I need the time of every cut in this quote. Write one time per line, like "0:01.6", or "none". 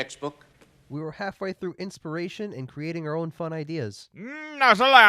none